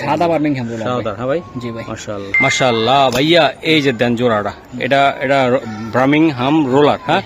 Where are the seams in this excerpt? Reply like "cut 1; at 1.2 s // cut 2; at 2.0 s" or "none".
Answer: none